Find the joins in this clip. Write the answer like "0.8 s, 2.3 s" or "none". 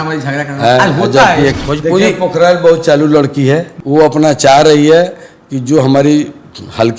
1.5 s, 3.7 s